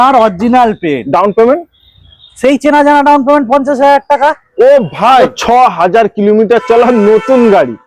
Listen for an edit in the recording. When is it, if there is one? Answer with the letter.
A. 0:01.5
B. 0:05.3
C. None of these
B